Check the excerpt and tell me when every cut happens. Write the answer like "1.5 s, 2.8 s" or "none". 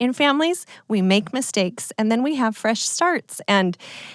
none